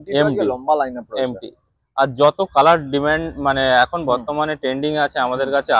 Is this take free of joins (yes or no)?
yes